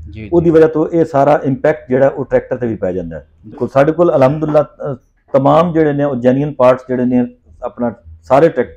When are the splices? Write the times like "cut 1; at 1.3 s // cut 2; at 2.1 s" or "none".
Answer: cut 1; at 3.6 s